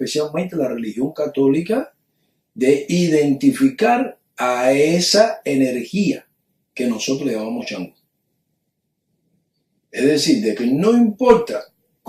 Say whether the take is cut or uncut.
cut